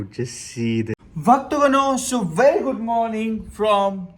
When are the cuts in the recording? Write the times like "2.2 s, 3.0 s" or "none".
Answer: 1.0 s